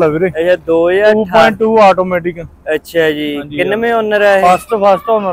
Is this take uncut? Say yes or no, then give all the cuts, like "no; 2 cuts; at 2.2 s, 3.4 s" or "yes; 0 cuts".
yes; 0 cuts